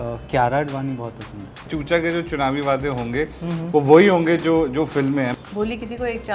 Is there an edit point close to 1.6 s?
yes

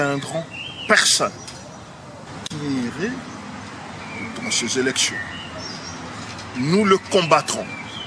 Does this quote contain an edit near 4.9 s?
no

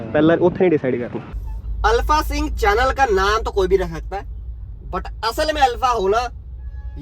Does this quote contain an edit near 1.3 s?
yes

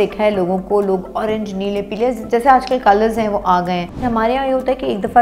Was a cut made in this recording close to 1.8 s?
no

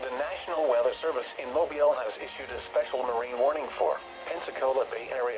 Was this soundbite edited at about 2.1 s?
no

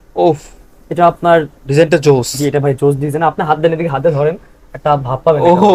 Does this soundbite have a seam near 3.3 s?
no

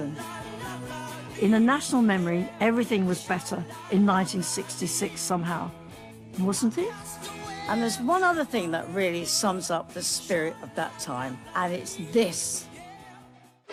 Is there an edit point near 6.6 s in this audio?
no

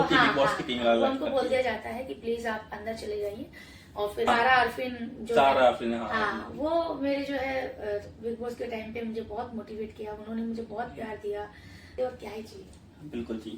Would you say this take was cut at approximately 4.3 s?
yes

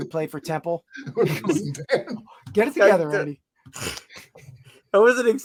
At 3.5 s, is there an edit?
no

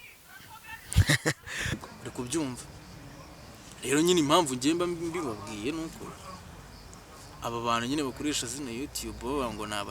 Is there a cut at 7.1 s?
no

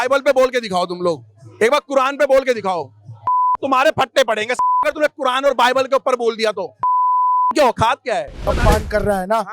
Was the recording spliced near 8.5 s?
yes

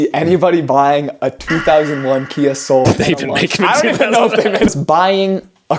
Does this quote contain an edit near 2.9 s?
yes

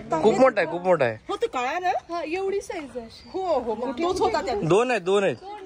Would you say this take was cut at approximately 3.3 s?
no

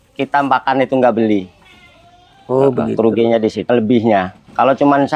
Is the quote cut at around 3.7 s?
yes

